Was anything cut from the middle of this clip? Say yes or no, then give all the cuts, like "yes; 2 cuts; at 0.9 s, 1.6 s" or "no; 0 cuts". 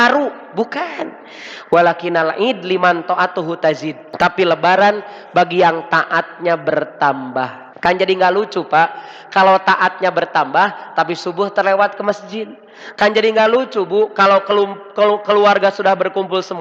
yes; 2 cuts; at 4.0 s, 7.6 s